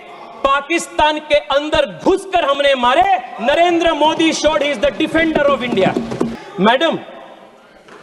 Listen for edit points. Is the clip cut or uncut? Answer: cut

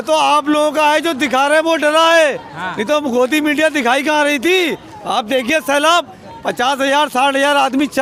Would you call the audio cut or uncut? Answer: uncut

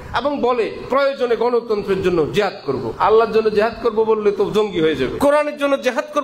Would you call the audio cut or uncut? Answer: cut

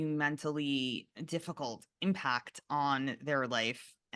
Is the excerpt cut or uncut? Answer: cut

